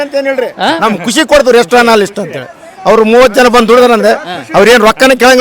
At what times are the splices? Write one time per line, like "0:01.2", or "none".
none